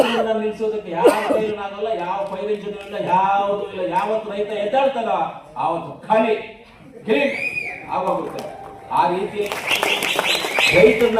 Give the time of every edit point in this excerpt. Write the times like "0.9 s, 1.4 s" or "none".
9.5 s